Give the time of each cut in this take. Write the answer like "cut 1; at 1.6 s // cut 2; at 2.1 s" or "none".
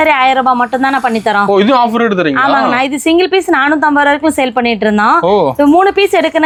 none